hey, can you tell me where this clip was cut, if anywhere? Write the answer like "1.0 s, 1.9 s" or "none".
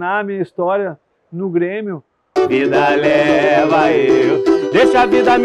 2.3 s